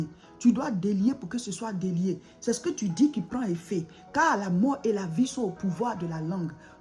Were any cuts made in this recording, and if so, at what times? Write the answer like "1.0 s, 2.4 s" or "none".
2.3 s